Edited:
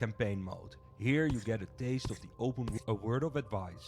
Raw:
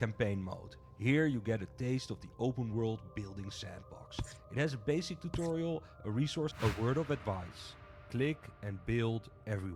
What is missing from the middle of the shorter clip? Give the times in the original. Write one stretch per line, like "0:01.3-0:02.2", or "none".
0:02.8-0:06.5